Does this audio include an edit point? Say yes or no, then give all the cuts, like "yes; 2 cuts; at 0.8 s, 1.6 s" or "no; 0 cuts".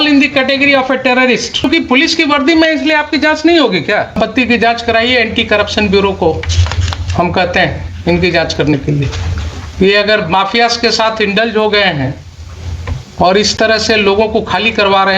yes; 2 cuts; at 1.6 s, 4.1 s